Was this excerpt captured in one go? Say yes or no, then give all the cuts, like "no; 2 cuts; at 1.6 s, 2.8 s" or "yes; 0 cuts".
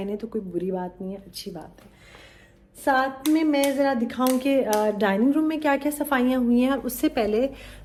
yes; 0 cuts